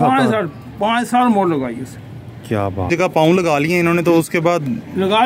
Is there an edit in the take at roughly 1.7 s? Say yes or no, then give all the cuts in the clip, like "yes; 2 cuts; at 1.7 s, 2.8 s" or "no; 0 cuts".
no; 1 cut; at 2.9 s